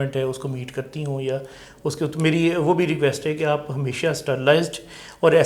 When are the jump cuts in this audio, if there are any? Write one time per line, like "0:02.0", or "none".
none